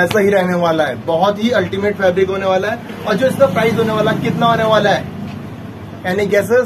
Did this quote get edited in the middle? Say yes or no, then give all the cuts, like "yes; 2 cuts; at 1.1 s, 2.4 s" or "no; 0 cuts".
no; 0 cuts